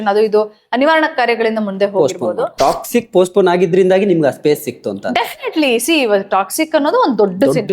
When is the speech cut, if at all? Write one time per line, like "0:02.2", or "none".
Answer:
0:02.6

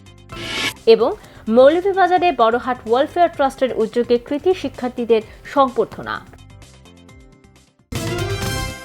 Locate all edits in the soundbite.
0:07.9

